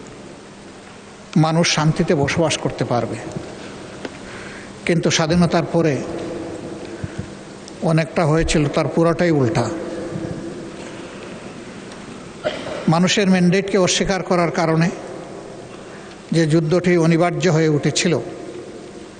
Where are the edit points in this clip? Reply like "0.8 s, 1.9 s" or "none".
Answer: none